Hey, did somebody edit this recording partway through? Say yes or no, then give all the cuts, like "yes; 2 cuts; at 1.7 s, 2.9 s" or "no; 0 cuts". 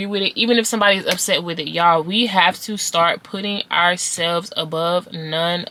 no; 0 cuts